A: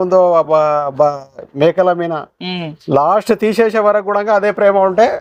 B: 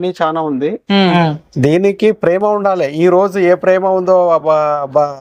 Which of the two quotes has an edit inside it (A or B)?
B